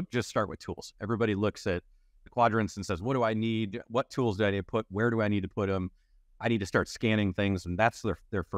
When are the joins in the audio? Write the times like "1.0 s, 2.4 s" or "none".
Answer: none

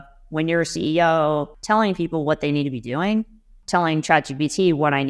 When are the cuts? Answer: 1.5 s, 3.6 s

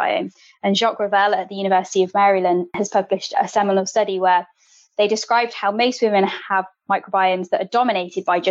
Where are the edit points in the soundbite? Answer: 2.8 s

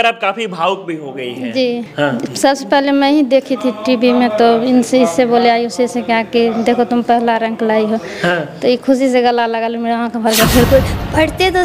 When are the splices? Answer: 1.9 s, 10.7 s

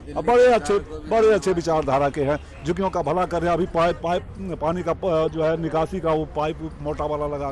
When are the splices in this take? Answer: none

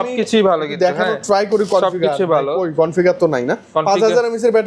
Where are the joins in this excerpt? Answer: none

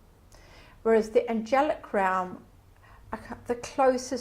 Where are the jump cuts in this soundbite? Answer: 1.7 s

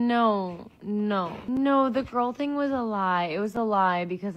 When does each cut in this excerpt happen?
1.4 s

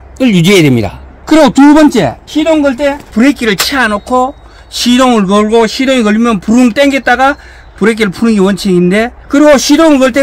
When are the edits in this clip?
2.2 s, 3.1 s, 9.2 s

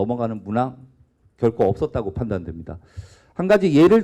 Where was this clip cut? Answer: none

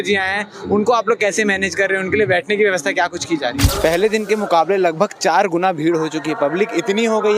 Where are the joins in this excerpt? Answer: 3.7 s

